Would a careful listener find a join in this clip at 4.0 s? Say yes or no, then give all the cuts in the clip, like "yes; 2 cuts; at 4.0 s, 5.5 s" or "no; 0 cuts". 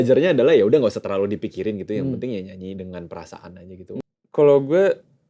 yes; 1 cut; at 4.0 s